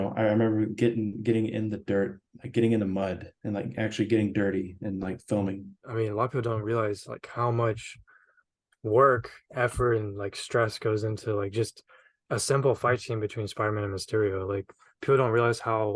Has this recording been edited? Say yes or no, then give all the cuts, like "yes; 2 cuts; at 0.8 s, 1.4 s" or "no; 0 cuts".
yes; 1 cut; at 5.8 s